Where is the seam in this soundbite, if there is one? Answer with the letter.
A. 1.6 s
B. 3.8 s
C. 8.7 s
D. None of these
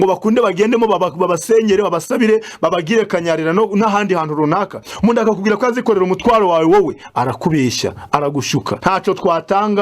C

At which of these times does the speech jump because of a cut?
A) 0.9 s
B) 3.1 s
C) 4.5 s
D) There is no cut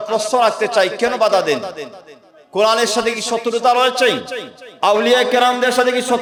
D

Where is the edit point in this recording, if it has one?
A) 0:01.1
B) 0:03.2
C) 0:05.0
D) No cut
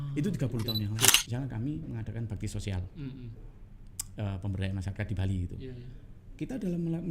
A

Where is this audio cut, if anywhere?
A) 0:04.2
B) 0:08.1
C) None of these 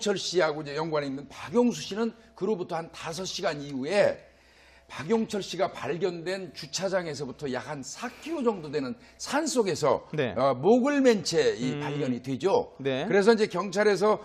A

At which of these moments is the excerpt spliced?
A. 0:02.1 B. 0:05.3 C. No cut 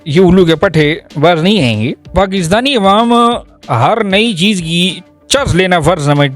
A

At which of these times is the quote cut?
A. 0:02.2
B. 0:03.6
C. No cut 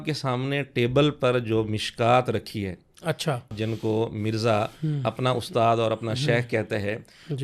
B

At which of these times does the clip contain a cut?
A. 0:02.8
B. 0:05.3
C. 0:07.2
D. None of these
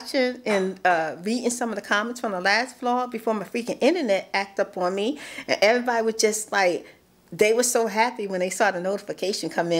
D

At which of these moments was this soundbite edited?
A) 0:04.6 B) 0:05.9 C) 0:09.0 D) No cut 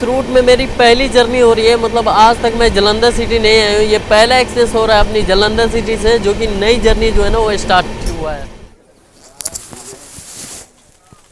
D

